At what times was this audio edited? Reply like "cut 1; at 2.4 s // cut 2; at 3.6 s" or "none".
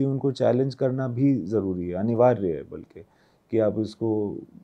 none